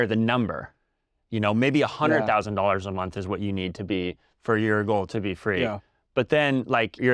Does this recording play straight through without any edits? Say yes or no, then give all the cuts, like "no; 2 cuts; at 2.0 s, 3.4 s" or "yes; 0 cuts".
yes; 0 cuts